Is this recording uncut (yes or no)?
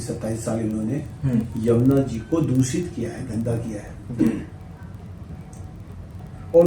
yes